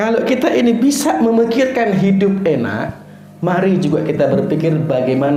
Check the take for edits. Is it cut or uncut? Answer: uncut